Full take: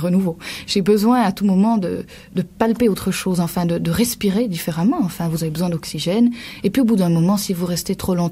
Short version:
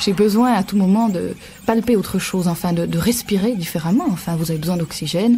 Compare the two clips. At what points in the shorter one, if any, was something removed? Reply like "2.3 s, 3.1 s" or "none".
1.6 s